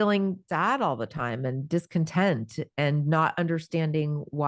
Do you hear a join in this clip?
no; 0 cuts

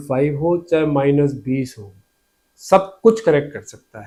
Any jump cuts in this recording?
no; 0 cuts

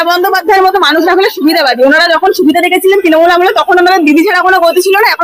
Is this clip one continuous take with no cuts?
yes; 0 cuts

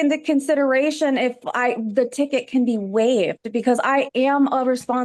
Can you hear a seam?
no; 0 cuts

